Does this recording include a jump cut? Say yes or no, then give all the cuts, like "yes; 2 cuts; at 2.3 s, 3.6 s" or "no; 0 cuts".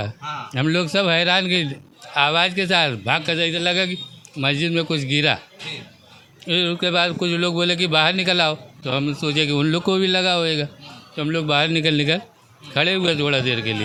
no; 0 cuts